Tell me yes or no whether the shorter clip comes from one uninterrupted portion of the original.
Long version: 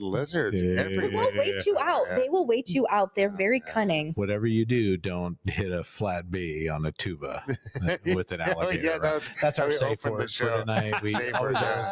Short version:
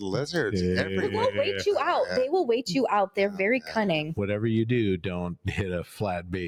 yes